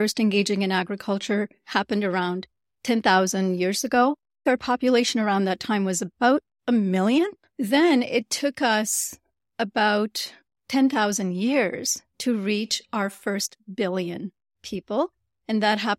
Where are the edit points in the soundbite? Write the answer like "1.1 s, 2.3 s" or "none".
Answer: 4.4 s, 7.4 s